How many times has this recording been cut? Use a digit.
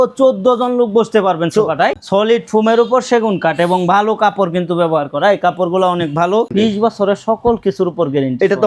2